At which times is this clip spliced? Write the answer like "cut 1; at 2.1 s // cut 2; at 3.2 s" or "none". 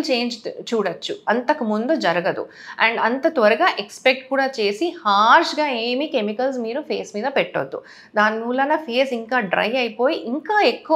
none